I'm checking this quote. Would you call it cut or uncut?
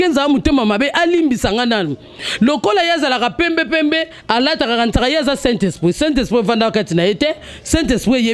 uncut